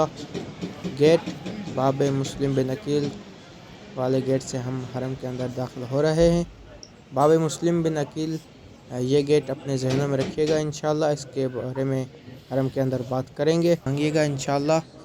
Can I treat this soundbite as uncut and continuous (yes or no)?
no